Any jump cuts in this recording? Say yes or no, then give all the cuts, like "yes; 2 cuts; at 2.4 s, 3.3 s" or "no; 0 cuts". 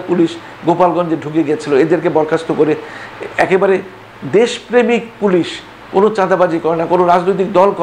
no; 0 cuts